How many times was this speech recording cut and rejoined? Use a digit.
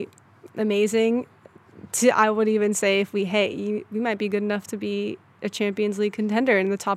0